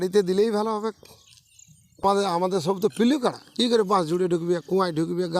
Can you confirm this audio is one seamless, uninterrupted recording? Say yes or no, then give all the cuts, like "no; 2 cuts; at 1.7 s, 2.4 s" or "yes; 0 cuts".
no; 1 cut; at 2.0 s